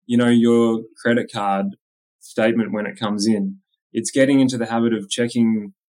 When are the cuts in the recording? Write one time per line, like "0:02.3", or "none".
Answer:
none